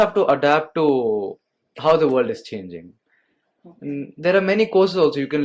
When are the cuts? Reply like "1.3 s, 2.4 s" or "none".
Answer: none